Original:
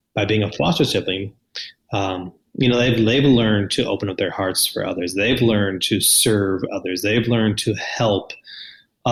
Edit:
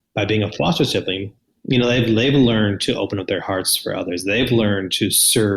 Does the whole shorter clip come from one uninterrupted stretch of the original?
no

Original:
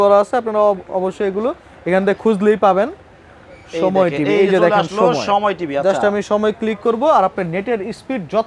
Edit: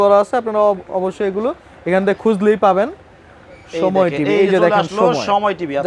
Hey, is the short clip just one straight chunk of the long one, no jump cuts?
yes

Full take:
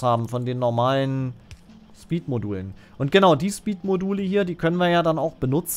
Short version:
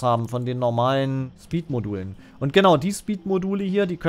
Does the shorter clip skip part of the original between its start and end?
yes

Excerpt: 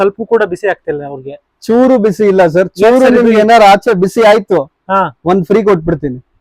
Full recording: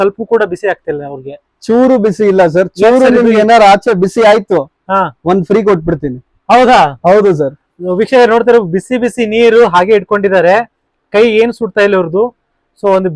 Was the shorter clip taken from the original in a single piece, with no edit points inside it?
yes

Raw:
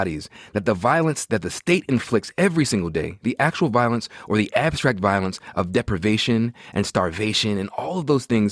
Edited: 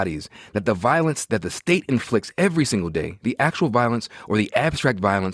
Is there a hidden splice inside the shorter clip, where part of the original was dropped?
no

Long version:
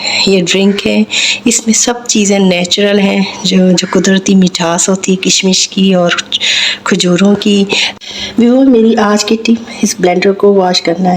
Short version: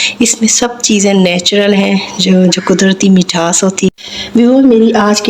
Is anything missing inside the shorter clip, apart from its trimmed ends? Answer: yes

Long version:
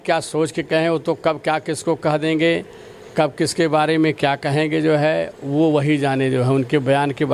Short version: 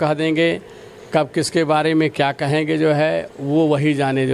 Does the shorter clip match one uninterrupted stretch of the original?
yes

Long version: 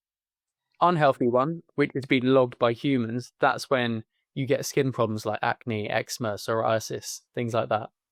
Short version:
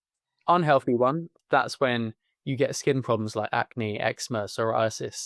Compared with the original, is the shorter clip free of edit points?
no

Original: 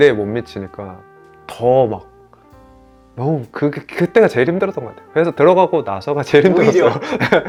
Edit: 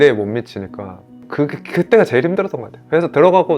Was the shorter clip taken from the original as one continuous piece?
no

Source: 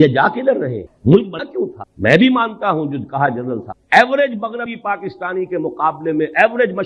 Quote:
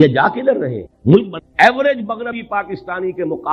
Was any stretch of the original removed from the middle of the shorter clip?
yes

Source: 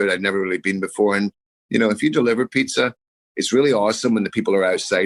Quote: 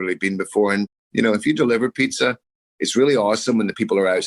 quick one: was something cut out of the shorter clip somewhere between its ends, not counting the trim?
yes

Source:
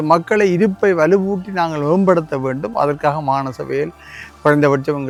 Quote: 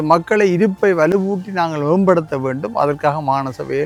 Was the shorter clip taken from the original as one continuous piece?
yes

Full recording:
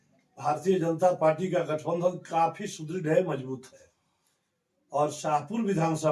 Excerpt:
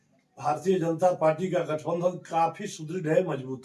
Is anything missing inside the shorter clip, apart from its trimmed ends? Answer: no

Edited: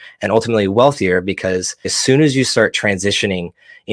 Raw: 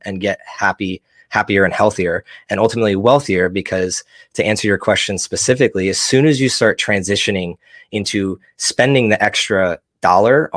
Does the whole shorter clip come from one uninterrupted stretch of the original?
no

